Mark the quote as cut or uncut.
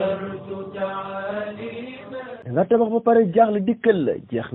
cut